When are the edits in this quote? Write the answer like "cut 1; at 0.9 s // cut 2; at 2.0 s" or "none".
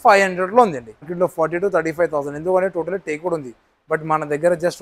cut 1; at 1.1 s